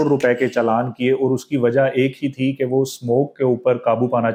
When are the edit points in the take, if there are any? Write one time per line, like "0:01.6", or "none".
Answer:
none